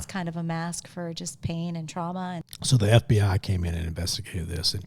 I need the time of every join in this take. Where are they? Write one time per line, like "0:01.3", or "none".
0:02.5